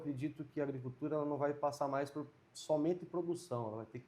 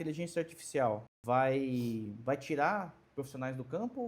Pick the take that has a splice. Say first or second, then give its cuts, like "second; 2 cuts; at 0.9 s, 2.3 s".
second; 2 cuts; at 1.1 s, 2.1 s